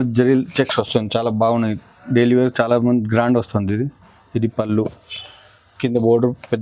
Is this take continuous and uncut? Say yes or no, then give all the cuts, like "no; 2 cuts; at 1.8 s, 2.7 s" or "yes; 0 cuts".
yes; 0 cuts